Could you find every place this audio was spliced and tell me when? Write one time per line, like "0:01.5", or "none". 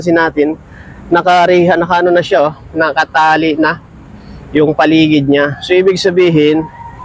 none